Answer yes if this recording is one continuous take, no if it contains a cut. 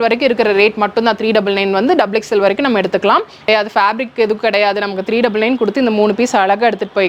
no